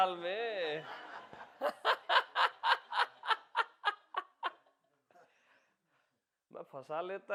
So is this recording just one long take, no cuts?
yes; 0 cuts

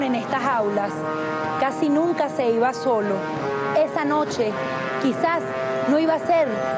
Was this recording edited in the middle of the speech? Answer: no; 0 cuts

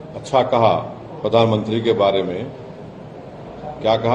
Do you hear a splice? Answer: no; 0 cuts

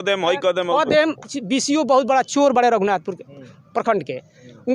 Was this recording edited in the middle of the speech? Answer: yes; 1 cut; at 1.3 s

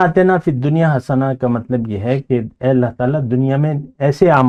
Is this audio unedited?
yes; 0 cuts

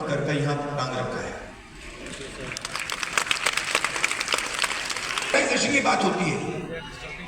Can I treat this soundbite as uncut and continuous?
no; 1 cut; at 5.3 s

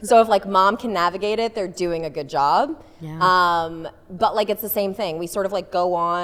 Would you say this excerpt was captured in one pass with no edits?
yes; 0 cuts

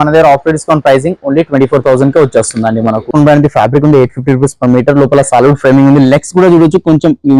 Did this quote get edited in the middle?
yes; 1 cut; at 3.1 s

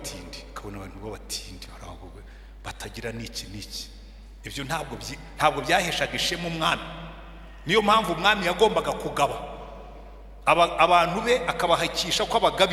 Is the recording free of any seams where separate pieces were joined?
yes; 0 cuts

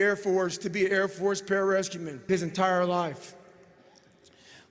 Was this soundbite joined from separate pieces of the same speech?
yes; 1 cut; at 2.3 s

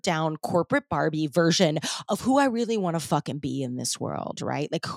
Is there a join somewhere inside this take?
no; 0 cuts

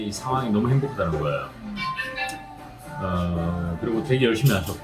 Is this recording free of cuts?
yes; 0 cuts

